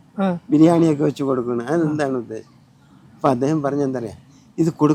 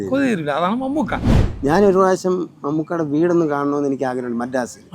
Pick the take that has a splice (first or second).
second